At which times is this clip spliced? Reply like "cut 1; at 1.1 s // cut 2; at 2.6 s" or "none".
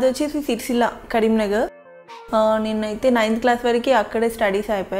cut 1; at 1.8 s